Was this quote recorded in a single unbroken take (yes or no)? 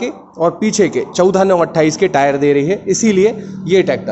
yes